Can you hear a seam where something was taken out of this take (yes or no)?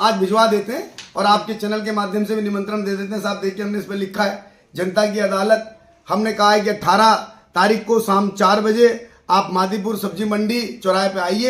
no